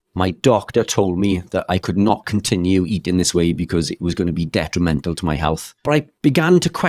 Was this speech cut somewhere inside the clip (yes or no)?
yes